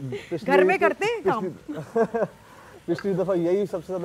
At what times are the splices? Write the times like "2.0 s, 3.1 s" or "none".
none

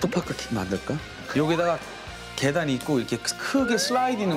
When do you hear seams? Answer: 1.2 s

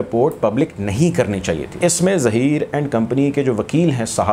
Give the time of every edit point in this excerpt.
1.8 s

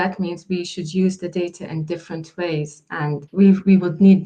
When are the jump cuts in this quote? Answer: 3.3 s

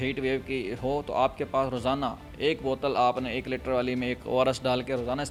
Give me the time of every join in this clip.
none

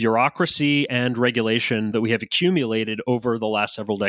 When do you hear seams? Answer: 1.9 s

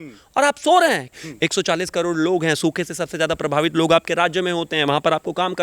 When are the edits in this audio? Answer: 1.2 s

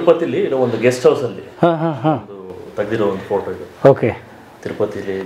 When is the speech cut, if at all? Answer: none

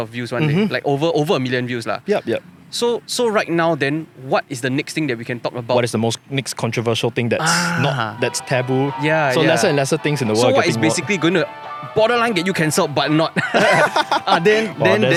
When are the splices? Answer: none

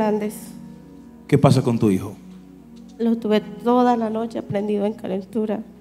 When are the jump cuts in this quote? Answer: none

